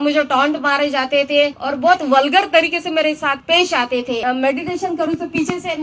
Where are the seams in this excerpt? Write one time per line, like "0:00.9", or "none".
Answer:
0:01.6
0:03.4
0:04.2